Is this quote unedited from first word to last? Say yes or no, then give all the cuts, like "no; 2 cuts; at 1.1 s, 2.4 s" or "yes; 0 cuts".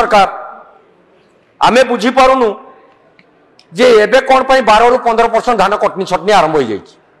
yes; 0 cuts